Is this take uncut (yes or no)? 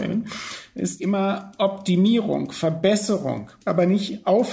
no